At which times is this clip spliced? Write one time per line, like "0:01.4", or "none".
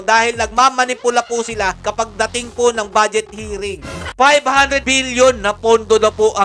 0:01.8
0:04.1